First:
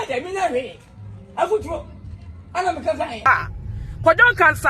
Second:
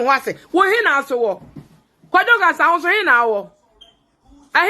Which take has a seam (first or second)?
first